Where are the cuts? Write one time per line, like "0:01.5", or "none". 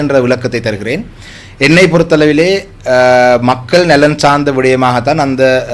none